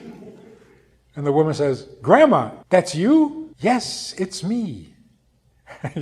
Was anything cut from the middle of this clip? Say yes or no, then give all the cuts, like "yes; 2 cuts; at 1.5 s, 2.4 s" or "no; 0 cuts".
yes; 2 cuts; at 2.5 s, 3.5 s